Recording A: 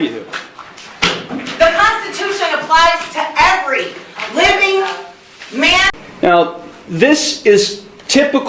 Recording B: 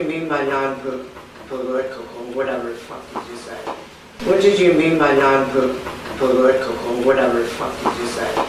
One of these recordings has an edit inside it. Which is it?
A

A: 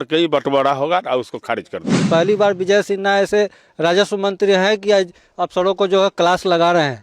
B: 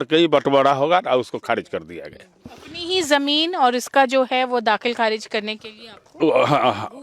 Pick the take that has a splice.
A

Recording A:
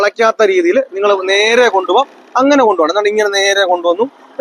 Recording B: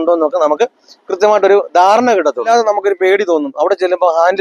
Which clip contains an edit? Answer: B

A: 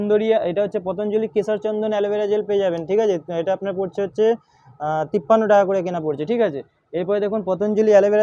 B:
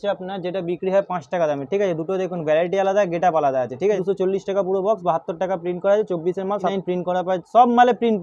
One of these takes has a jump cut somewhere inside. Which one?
B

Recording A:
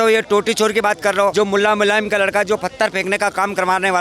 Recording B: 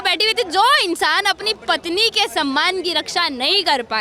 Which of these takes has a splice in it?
A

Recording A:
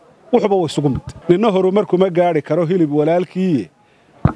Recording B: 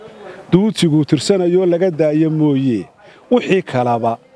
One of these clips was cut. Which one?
A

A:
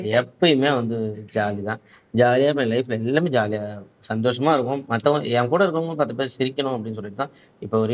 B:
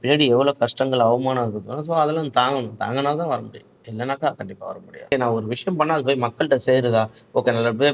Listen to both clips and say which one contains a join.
B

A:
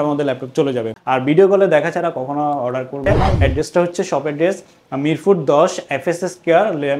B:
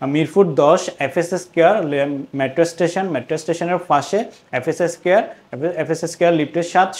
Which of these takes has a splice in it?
A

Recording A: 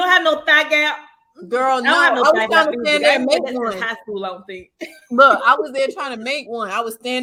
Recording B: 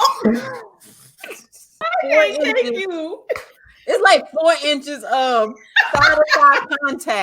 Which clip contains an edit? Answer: B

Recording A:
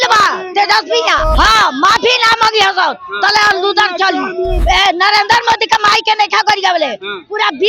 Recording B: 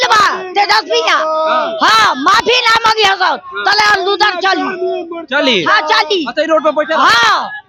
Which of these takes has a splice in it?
A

